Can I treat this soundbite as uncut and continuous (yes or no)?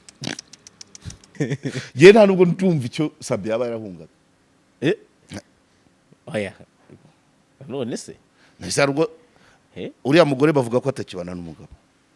no